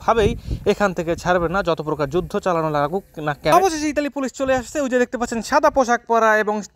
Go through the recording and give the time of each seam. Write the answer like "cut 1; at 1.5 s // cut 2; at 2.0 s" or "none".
cut 1; at 3.5 s